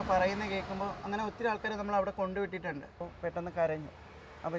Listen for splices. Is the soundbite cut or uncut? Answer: cut